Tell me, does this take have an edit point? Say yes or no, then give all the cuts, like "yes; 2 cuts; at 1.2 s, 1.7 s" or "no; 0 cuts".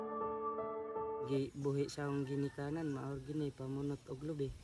yes; 1 cut; at 1.3 s